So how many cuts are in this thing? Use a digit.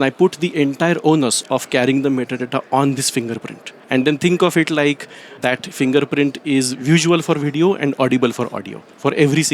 2